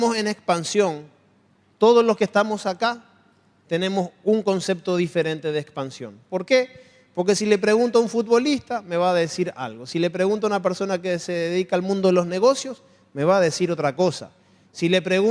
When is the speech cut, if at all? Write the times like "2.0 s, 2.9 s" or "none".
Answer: 10.3 s

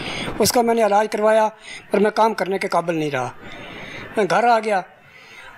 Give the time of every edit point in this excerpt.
none

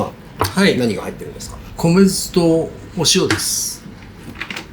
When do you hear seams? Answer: 1.6 s

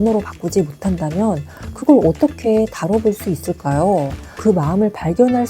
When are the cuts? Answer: 4.4 s

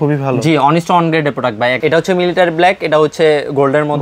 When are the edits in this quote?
1.8 s

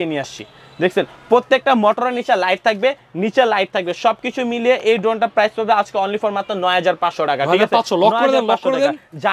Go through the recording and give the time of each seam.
none

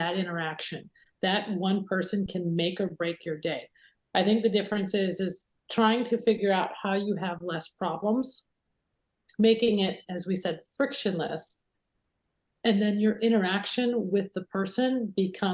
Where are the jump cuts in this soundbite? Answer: none

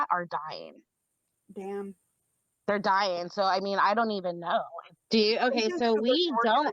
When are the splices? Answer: 4.8 s

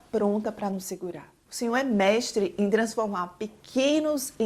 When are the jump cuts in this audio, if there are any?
1.5 s

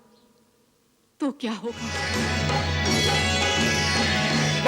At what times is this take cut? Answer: 2.0 s

